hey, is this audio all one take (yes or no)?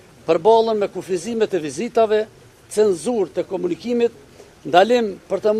yes